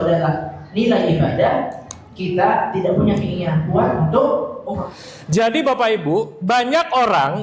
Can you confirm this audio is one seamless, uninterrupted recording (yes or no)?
no